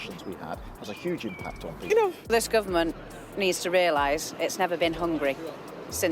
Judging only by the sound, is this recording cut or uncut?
cut